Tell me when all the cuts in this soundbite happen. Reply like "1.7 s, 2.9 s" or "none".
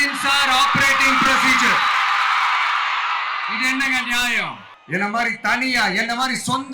4.7 s